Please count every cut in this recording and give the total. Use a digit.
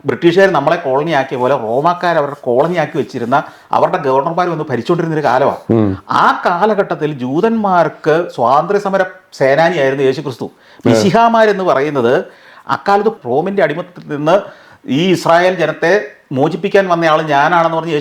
0